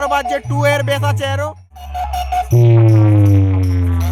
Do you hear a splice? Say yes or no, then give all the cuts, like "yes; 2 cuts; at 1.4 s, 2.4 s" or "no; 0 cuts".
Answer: yes; 1 cut; at 1.8 s